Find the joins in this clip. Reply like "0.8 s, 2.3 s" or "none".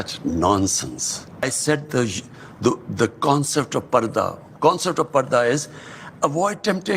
1.4 s